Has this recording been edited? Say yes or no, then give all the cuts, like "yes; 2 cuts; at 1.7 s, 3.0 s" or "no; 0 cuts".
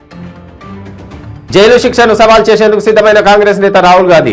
no; 0 cuts